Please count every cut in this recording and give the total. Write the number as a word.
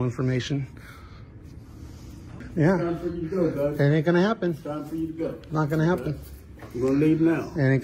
one